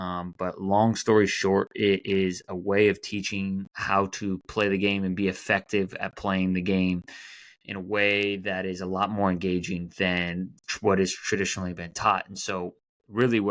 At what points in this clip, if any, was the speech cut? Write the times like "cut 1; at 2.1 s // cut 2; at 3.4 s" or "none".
cut 1; at 3.7 s